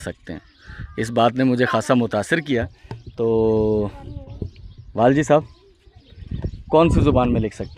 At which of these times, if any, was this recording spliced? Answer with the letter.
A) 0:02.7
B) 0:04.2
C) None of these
C